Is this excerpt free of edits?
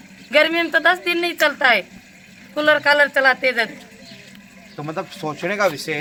yes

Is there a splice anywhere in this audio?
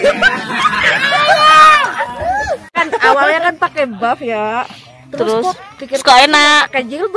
yes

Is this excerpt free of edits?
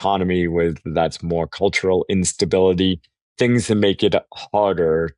yes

